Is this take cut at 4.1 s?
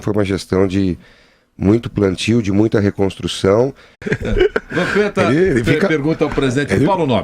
no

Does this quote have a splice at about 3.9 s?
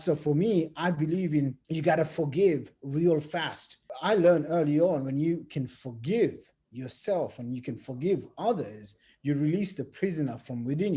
yes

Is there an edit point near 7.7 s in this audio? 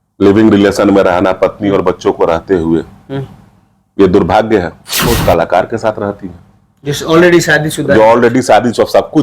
no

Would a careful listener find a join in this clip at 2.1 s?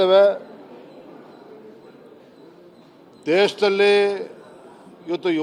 no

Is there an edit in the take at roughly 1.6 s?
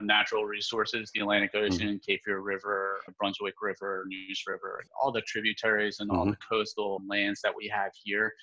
no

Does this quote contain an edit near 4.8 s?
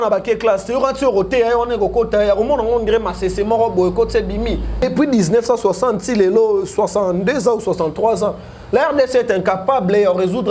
yes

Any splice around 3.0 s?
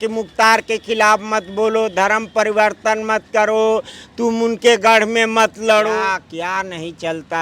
no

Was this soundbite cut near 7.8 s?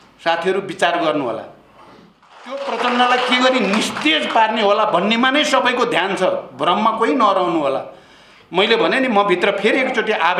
no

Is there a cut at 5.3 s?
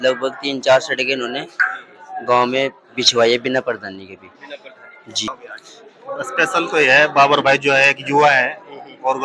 yes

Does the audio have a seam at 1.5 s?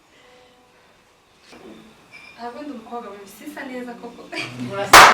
yes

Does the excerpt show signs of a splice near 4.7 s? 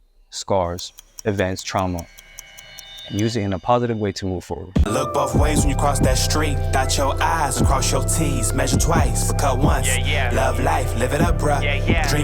yes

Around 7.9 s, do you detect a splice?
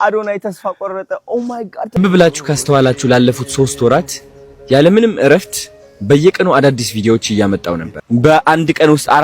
yes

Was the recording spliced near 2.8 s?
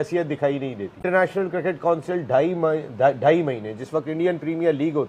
no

